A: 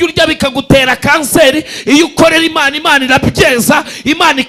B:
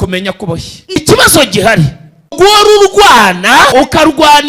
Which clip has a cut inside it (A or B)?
B